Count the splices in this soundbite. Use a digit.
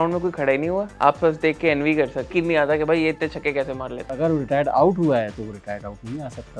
3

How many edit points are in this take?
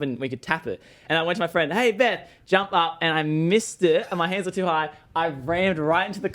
1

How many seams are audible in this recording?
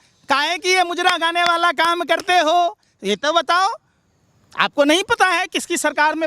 0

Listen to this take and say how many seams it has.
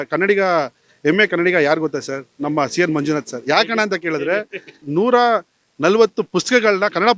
1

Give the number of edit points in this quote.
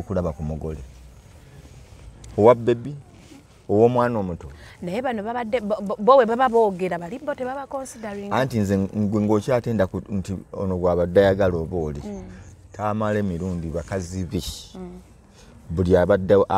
0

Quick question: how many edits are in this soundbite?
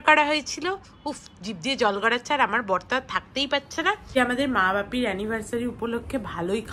1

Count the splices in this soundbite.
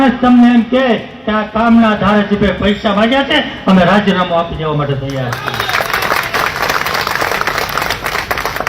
0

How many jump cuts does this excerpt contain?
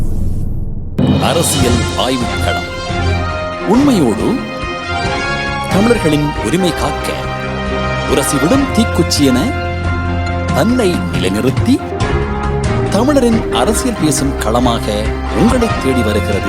1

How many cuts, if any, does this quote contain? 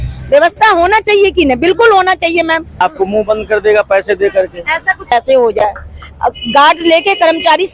2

